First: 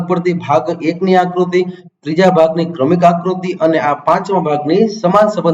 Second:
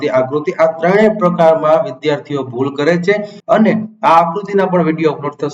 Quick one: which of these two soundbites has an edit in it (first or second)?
second